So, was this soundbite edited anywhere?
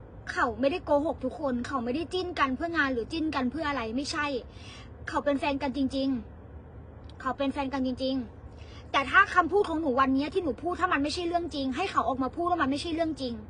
no; 0 cuts

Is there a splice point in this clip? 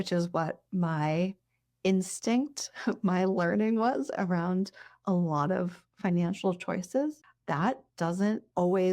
yes; 1 cut; at 7.3 s

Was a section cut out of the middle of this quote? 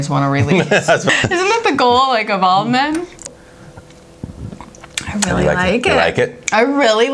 yes; 2 cuts; at 1.0 s, 3.2 s

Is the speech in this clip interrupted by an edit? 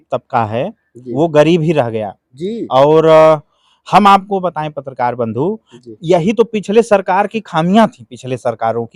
no; 0 cuts

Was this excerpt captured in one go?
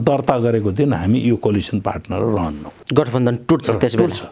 yes; 0 cuts

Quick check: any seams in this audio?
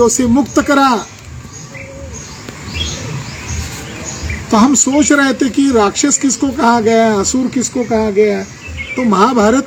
no; 0 cuts

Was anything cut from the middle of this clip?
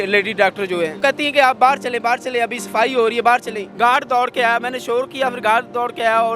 yes; 2 cuts; at 1.0 s, 3.6 s

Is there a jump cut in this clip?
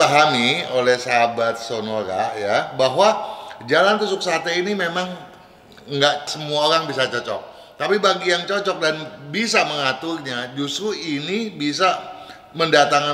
no; 0 cuts

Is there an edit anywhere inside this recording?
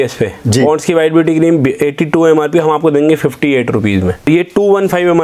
yes; 1 cut; at 4.2 s

